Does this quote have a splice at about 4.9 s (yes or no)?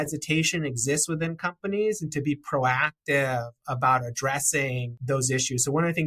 yes